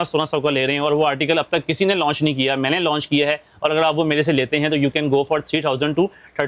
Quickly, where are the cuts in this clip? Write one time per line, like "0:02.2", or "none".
none